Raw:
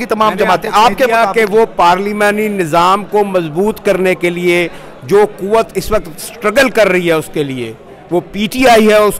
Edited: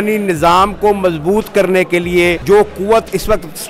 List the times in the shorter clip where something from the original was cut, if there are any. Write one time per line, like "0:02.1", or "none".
0:02.4